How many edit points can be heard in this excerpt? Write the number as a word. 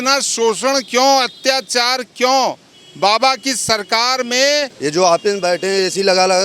one